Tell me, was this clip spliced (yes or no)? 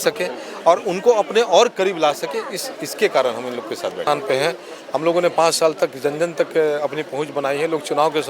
yes